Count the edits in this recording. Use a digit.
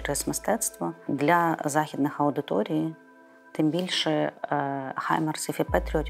1